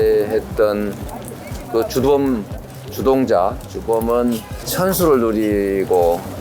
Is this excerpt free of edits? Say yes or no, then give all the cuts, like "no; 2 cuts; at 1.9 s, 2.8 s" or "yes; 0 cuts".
no; 1 cut; at 4.6 s